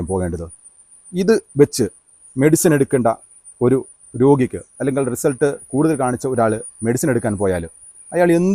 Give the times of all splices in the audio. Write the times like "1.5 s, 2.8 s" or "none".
none

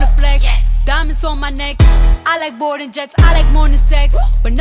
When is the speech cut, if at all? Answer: none

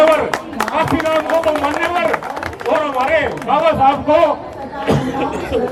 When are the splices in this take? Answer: none

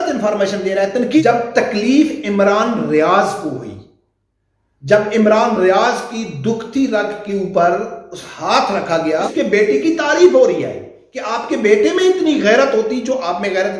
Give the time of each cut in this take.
1.1 s, 9.3 s

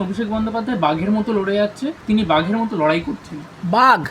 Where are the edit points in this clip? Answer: 2.0 s

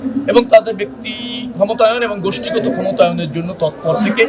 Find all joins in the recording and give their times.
none

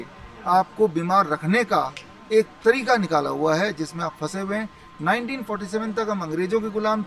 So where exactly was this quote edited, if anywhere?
none

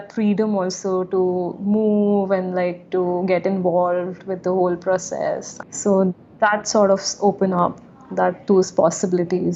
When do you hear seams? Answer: none

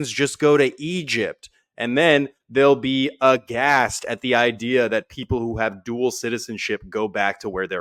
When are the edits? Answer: none

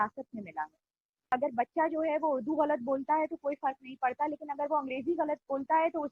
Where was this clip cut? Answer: 1.2 s

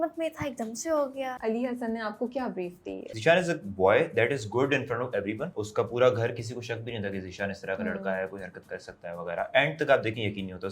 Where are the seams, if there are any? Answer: 1.4 s, 3.1 s, 5.5 s

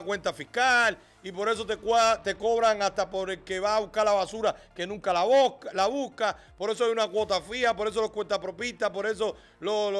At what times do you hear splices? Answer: none

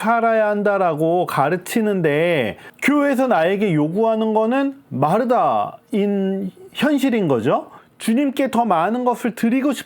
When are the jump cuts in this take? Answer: 7.8 s

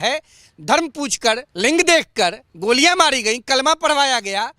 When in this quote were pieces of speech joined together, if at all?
1.5 s, 2.5 s

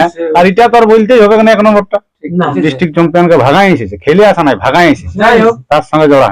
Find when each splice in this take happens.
2.6 s

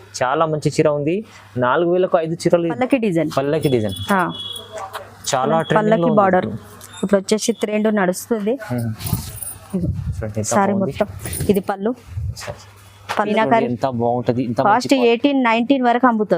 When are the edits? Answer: 2.7 s, 13.3 s

